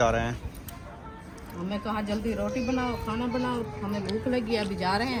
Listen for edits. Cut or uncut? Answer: uncut